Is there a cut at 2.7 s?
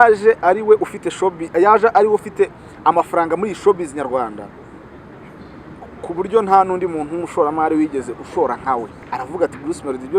no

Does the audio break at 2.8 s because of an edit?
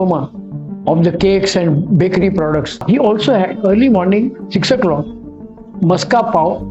yes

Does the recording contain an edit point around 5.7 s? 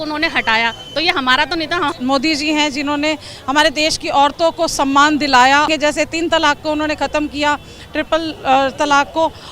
yes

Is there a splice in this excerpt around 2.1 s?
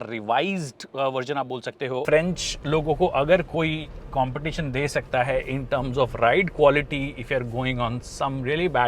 yes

